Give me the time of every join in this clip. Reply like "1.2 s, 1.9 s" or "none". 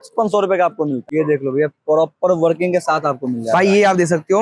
1.0 s